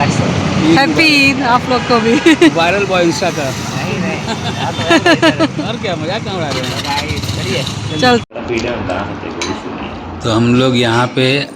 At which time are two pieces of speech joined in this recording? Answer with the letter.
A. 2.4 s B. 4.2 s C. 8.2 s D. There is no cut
C